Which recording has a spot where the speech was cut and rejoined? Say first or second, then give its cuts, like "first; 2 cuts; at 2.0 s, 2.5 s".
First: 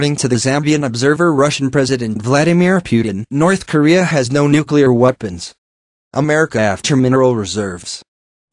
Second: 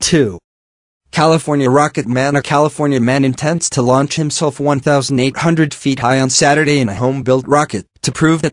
first; 1 cut; at 6.8 s